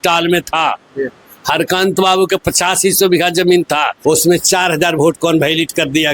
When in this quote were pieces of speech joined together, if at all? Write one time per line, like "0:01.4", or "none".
0:03.9